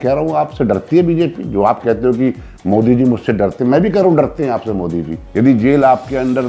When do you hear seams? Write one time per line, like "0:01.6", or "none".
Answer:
0:05.2

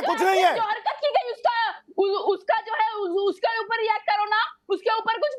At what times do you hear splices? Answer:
none

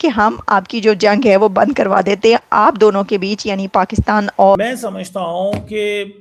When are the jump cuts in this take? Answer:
0:04.6

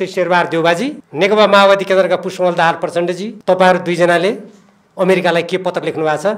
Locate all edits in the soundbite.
0:01.0
0:03.3

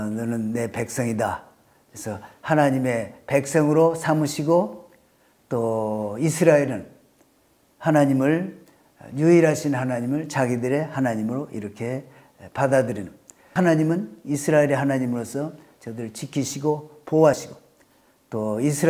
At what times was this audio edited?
0:13.4

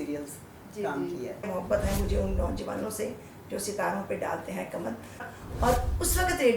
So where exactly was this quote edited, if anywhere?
0:01.5
0:05.2

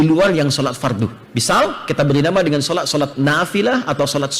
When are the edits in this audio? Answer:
0:01.3

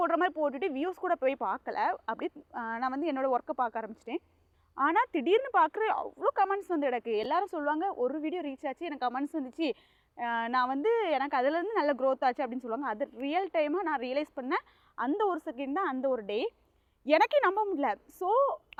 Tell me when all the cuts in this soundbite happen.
none

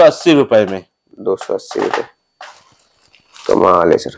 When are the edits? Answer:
none

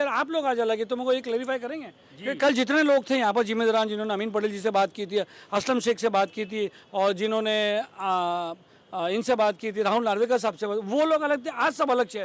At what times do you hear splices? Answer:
none

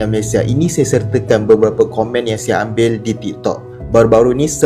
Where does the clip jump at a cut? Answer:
none

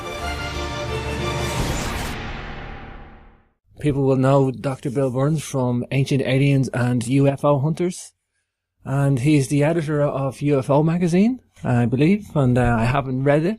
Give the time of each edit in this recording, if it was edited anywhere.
none

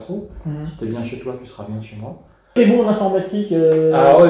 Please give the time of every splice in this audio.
0:02.5

